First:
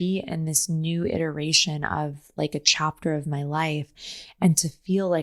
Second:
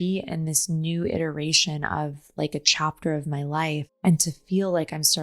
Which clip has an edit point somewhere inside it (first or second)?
second